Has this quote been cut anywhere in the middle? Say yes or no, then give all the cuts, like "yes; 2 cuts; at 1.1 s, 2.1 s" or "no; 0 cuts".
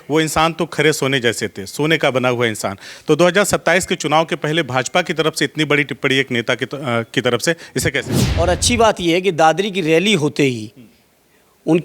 yes; 1 cut; at 8.1 s